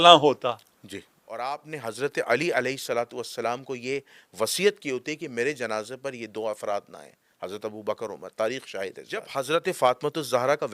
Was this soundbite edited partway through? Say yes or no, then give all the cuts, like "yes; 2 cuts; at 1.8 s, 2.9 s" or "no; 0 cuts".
yes; 2 cuts; at 1.2 s, 9.3 s